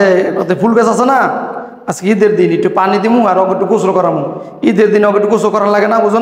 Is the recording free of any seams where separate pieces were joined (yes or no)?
yes